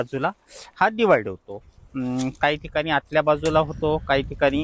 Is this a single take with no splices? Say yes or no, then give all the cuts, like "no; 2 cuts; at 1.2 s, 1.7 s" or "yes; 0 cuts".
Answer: yes; 0 cuts